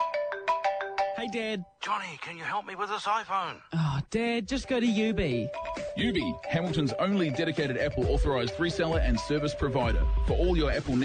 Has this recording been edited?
yes; 1 cut; at 1.1 s

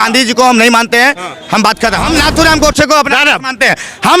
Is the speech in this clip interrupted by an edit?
yes; 1 cut; at 2.0 s

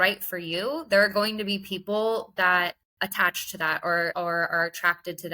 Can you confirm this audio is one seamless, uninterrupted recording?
no; 2 cuts; at 2.8 s, 4.1 s

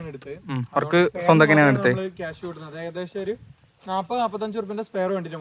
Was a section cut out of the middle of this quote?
no; 0 cuts

